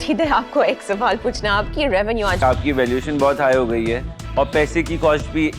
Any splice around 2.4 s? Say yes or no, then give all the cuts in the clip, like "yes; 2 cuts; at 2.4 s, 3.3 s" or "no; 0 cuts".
yes; 1 cut; at 2.4 s